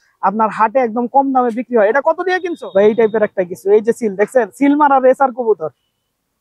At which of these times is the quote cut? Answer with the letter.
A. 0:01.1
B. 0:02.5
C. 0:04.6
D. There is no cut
B